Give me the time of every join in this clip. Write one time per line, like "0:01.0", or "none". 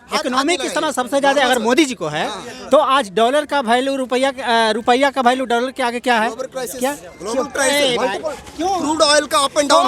none